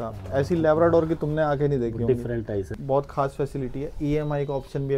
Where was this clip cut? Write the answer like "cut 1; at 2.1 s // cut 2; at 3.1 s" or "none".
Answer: cut 1; at 2.7 s